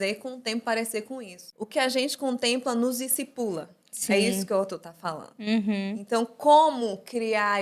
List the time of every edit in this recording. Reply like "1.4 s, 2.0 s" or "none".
1.4 s